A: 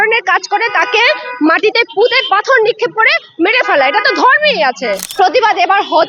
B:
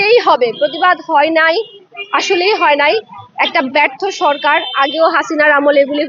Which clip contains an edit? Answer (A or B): A